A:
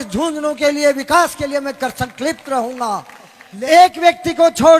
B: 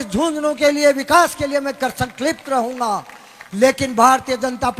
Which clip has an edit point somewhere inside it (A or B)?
A